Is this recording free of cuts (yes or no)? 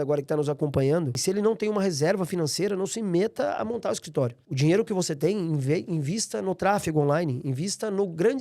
no